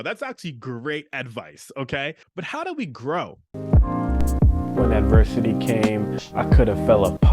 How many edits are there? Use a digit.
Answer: 2